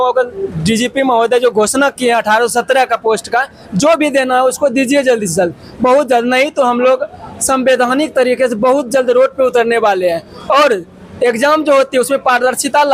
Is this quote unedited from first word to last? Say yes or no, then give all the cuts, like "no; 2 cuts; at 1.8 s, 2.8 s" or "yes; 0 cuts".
yes; 0 cuts